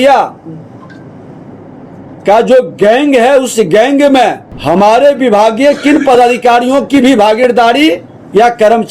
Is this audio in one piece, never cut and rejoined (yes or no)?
no